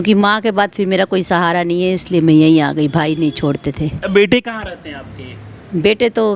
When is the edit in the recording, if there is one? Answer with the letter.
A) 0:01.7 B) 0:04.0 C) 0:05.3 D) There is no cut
B